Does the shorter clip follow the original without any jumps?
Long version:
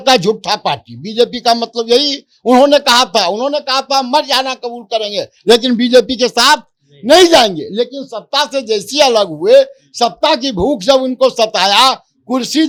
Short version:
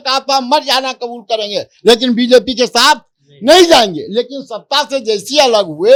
yes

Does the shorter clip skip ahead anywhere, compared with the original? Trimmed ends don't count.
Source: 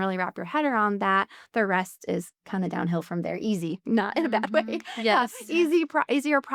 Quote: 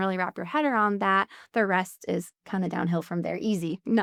no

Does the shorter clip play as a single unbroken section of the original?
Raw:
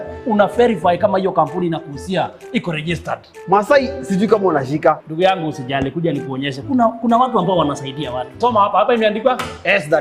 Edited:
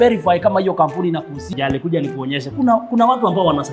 no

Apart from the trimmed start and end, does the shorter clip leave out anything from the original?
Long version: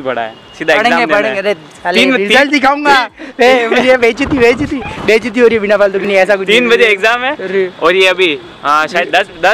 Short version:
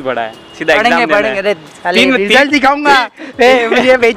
no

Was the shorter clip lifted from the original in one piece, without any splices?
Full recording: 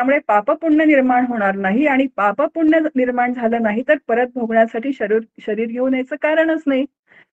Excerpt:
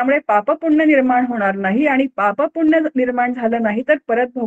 yes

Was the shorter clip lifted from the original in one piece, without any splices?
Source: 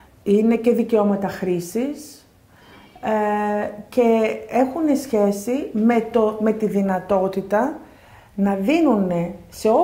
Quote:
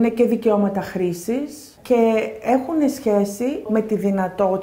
no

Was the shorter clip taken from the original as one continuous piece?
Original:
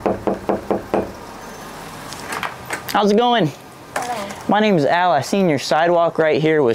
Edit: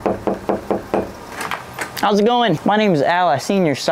no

